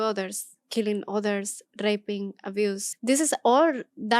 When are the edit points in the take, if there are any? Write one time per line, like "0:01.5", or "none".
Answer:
0:02.9